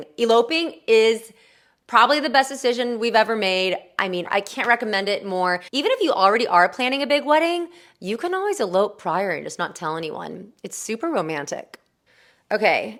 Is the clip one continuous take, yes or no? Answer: yes